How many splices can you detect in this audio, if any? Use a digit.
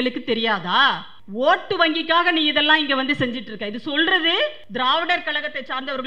2